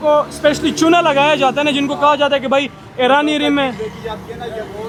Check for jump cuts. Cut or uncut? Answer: uncut